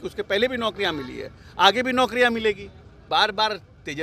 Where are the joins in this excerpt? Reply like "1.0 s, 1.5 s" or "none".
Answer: 3.0 s